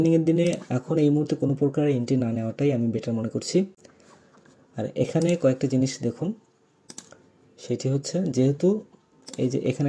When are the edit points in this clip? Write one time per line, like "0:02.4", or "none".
none